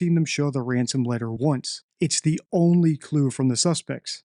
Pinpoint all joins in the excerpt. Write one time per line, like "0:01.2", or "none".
0:01.4